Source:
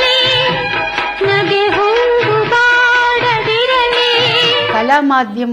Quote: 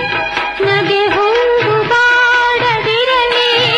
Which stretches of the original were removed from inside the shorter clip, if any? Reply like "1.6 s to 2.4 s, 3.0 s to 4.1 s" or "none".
none